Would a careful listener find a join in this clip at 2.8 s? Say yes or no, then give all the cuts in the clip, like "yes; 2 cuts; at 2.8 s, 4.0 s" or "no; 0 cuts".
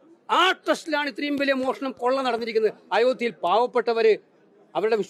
no; 0 cuts